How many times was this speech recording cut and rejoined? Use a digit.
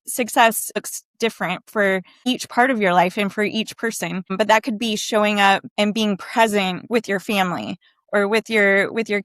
5